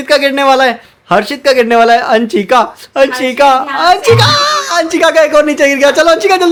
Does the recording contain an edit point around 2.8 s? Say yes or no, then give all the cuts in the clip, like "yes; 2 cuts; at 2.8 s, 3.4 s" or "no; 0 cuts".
no; 0 cuts